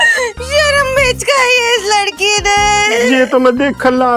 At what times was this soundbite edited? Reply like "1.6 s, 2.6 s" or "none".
none